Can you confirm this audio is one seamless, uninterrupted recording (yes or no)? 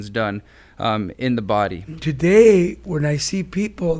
no